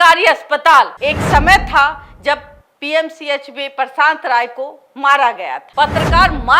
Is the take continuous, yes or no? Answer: no